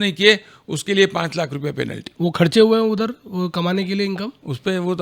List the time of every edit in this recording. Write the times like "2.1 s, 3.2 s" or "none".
none